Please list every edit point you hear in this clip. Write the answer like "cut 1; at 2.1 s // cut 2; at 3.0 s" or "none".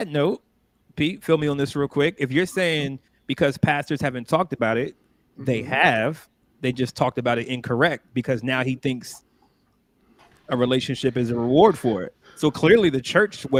none